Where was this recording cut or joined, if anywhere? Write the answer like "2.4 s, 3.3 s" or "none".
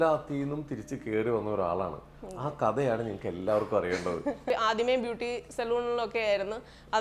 4.5 s